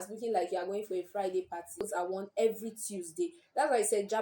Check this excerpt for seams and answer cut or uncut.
cut